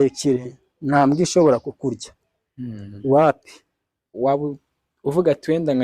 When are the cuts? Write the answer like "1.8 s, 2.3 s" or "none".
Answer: 4.1 s